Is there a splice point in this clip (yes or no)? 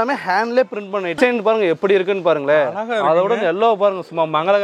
yes